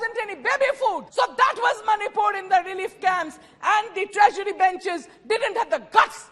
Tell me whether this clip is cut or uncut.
cut